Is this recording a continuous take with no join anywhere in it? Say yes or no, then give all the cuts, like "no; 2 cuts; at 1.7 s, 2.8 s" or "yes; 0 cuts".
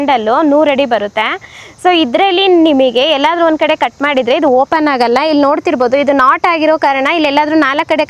yes; 0 cuts